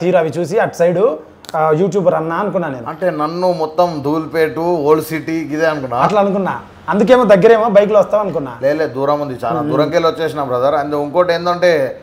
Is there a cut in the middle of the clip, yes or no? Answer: no